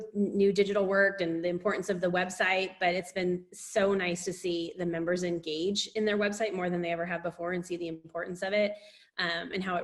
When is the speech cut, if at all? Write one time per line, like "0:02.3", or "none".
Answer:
none